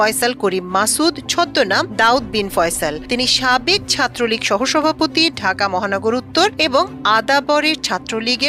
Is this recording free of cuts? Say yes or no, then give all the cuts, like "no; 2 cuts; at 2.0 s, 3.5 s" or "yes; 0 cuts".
yes; 0 cuts